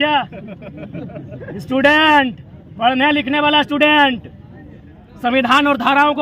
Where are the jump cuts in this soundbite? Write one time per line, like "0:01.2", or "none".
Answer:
none